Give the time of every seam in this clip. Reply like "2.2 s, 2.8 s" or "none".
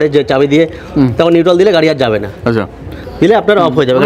none